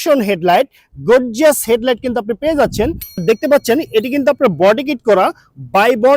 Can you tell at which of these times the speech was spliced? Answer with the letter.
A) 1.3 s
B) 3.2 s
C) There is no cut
B